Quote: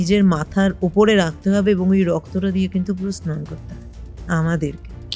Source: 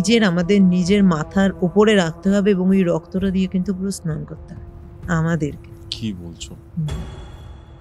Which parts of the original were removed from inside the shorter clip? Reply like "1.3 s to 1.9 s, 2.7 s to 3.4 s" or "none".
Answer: none